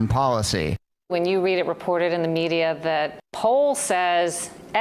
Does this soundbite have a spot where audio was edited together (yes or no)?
yes